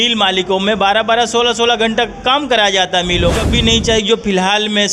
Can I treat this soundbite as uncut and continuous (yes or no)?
no